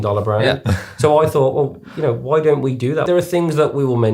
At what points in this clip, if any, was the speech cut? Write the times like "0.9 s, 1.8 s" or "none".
3.1 s